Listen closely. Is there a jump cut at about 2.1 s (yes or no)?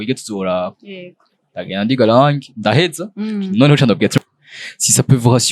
no